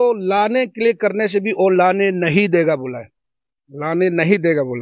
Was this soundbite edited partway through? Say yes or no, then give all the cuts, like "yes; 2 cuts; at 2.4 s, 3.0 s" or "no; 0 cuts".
no; 0 cuts